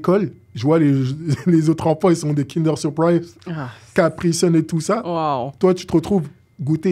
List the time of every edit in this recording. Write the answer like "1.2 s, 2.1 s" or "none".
none